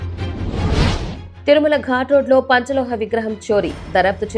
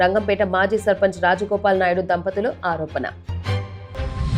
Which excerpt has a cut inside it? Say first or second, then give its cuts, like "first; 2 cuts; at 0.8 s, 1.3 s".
first; 1 cut; at 1.2 s